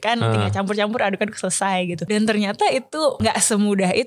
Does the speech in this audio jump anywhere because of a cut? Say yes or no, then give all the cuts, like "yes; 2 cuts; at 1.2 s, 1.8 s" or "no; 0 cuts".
yes; 2 cuts; at 2.0 s, 3.2 s